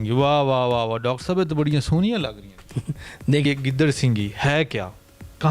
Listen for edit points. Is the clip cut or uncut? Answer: cut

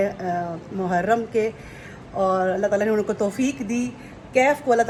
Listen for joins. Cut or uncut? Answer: uncut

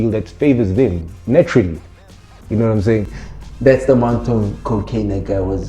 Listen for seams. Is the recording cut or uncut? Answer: cut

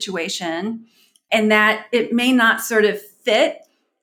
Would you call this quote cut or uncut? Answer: cut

